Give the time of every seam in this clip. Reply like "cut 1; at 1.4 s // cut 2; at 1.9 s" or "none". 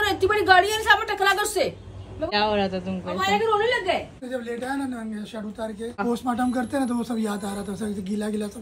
cut 1; at 2.3 s // cut 2; at 4.2 s // cut 3; at 6.0 s